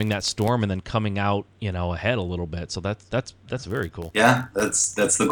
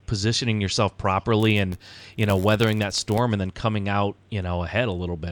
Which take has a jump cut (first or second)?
first